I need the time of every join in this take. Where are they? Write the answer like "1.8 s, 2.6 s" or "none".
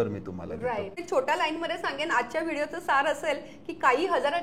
1.0 s